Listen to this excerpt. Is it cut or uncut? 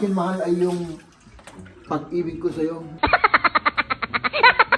cut